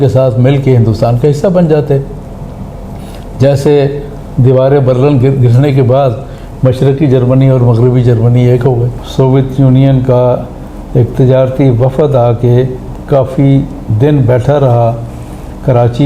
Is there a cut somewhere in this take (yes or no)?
yes